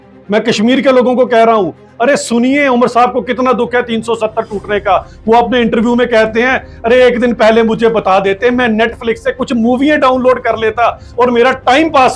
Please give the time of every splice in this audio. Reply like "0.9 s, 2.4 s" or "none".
none